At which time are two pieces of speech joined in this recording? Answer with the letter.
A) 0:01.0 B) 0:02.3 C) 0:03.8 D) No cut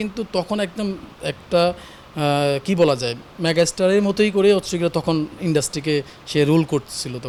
D